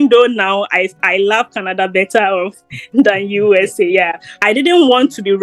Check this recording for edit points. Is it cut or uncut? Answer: cut